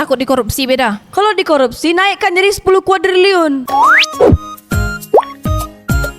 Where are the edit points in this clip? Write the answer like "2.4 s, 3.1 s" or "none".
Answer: 3.6 s